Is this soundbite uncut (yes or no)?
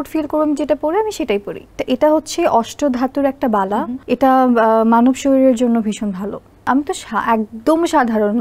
no